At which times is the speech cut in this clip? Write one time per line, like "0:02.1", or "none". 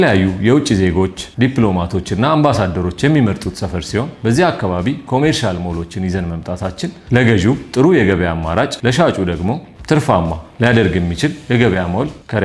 0:01.2
0:04.1
0:07.0
0:08.7